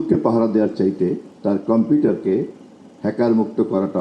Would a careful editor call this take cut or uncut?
uncut